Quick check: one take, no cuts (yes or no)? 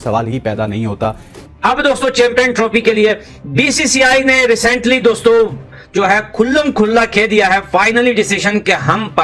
no